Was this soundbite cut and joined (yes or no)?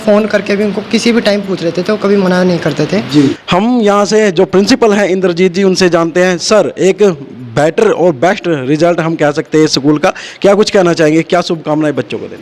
no